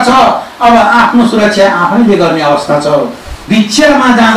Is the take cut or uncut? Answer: cut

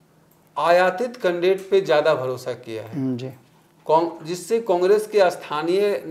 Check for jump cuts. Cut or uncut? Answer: uncut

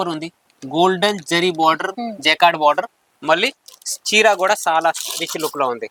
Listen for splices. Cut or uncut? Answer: uncut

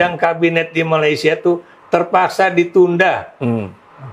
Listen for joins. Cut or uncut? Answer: uncut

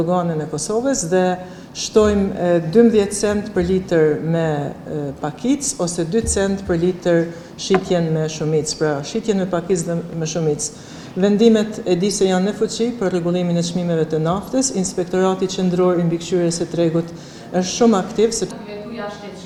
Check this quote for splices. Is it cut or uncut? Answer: uncut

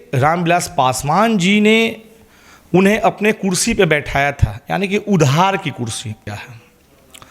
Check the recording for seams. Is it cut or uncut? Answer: cut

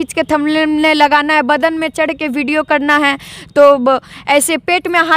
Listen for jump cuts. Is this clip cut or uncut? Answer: uncut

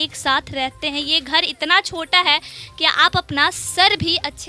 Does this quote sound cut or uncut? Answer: uncut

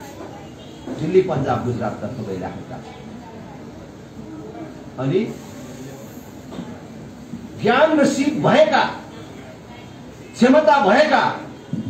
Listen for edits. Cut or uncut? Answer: uncut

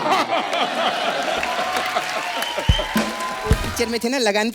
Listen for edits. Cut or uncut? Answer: cut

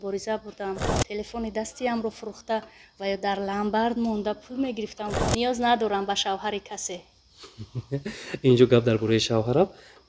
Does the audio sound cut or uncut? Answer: cut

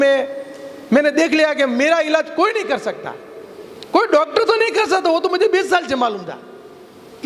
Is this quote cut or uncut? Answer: uncut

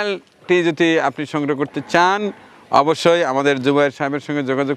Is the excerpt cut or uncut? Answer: uncut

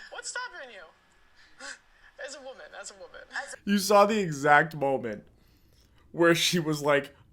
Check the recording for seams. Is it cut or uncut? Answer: cut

